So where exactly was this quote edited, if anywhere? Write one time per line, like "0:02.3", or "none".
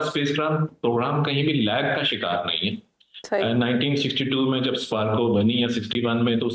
none